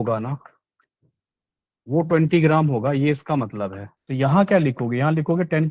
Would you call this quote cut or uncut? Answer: cut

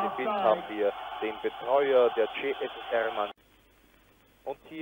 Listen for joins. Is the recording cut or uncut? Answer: cut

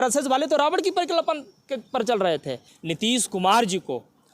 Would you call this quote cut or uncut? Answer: cut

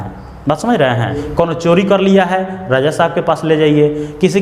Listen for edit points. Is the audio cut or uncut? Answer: cut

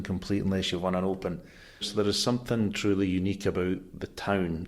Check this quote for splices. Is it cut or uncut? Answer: cut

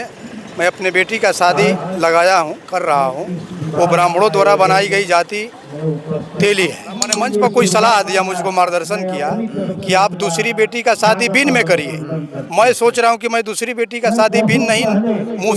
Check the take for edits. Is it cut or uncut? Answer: cut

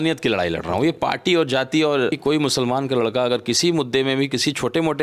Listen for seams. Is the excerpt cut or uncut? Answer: cut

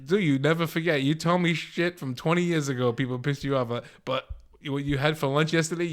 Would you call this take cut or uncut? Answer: uncut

